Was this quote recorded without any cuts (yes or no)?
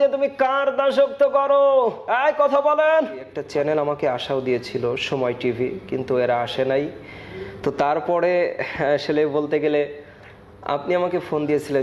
no